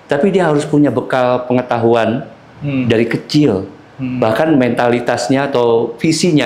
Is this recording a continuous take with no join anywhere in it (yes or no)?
yes